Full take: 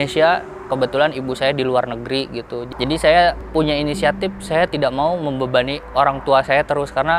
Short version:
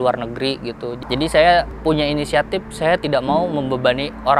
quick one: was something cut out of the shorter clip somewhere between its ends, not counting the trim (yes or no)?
no